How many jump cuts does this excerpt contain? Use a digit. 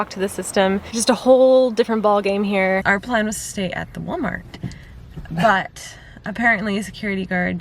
2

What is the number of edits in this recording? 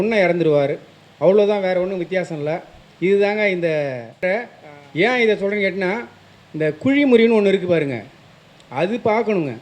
1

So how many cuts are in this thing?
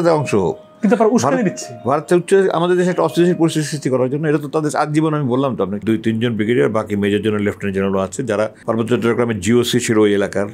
2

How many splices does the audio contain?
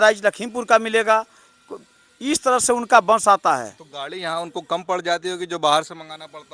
0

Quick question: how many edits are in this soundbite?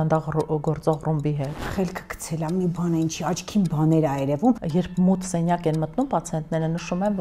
2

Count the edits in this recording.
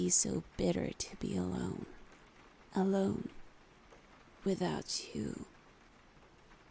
0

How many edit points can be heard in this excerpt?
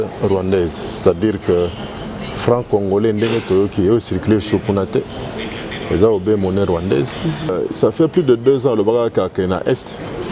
1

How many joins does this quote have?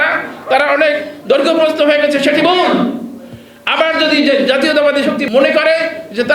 1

